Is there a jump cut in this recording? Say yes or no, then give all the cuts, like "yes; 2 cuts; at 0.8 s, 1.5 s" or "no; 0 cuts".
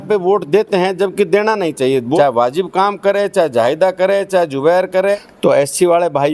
yes; 2 cuts; at 2.2 s, 5.2 s